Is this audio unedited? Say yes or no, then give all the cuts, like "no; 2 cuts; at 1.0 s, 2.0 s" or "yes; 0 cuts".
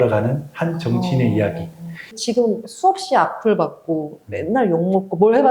no; 1 cut; at 2.2 s